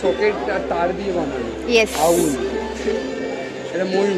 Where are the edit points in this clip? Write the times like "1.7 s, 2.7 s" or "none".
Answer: none